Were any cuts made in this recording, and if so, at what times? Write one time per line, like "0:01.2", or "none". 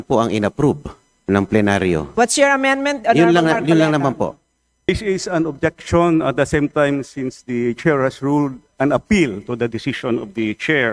0:04.9